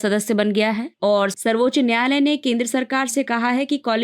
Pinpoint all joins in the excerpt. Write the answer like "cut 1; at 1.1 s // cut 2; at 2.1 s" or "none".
cut 1; at 1.0 s